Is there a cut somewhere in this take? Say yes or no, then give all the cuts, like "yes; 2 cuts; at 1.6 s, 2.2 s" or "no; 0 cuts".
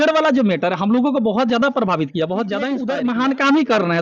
yes; 1 cut; at 2.7 s